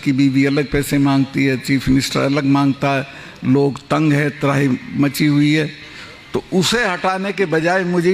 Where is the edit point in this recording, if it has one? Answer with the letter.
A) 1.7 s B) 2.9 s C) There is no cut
C